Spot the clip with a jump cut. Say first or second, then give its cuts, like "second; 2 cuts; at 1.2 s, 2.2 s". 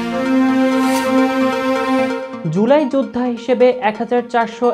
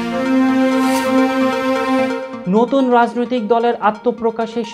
second; 1 cut; at 2.3 s